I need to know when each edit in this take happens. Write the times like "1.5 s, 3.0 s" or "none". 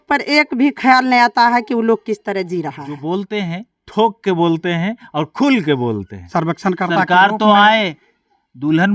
2.9 s, 6.3 s